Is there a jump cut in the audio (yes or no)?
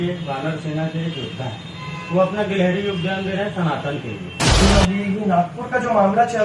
yes